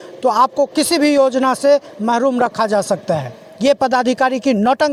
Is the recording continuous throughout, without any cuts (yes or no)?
yes